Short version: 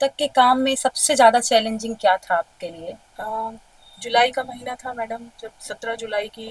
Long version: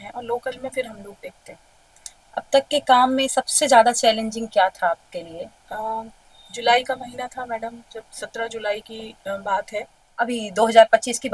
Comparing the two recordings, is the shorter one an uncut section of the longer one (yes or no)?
yes